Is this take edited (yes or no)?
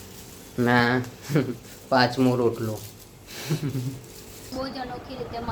yes